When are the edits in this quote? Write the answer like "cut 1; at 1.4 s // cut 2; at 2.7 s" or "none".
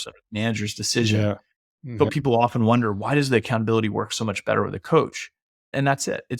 cut 1; at 2.1 s

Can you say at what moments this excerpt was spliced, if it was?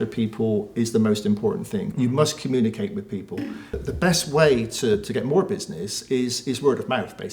cut 1; at 1.9 s // cut 2; at 3.7 s

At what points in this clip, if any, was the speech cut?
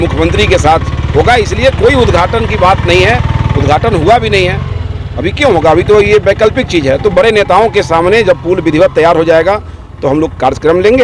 none

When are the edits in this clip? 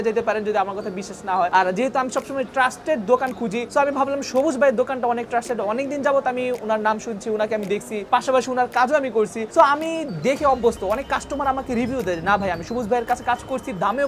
none

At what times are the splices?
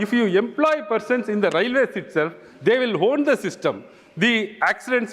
none

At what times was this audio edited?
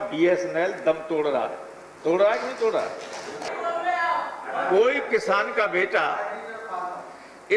cut 1; at 3.5 s

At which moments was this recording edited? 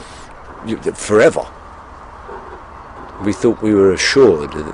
none

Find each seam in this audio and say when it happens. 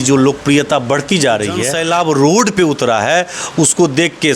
cut 1; at 1.7 s

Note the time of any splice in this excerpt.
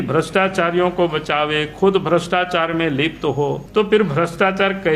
cut 1; at 3.6 s

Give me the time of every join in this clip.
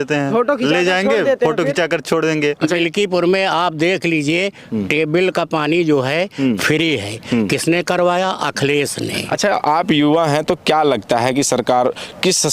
cut 1; at 2.8 s // cut 2; at 9.1 s

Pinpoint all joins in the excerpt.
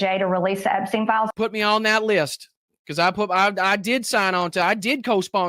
cut 1; at 1.3 s

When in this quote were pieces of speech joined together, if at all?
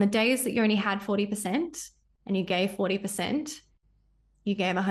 none

